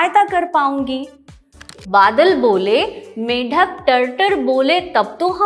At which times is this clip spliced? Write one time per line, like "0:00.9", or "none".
0:01.7

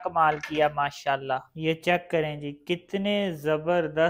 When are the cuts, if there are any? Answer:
0:01.5

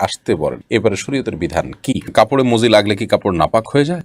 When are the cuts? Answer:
0:02.1

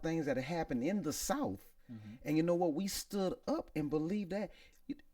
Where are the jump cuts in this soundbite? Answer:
none

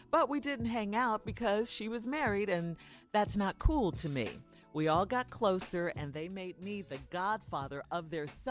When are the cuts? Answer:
none

